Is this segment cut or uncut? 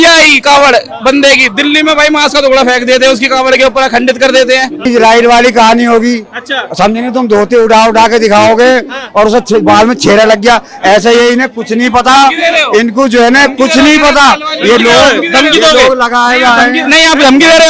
cut